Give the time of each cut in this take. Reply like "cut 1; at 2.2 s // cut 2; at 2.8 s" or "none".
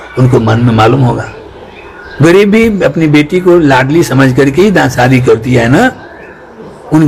none